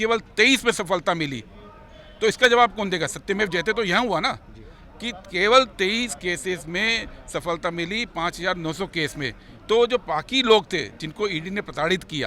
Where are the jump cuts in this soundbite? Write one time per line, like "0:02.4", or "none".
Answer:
none